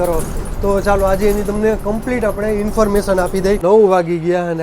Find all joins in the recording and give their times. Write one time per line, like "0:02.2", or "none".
0:03.6